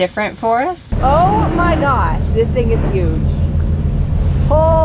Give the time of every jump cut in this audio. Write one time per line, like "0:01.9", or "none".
0:00.9